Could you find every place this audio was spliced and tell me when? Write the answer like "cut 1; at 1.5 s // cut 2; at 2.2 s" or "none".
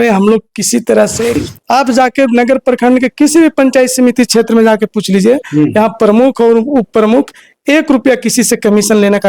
cut 1; at 1.4 s